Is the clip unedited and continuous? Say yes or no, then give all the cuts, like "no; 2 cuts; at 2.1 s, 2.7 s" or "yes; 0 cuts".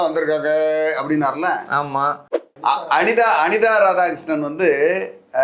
no; 1 cut; at 2.4 s